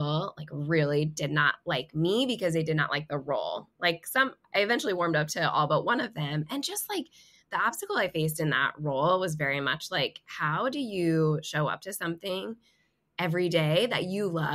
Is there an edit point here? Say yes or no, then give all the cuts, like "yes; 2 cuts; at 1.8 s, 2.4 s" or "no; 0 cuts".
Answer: no; 0 cuts